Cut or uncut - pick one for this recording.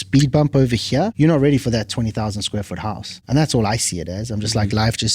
cut